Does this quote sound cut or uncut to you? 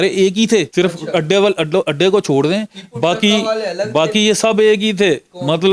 uncut